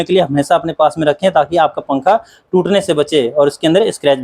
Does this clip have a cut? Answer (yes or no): no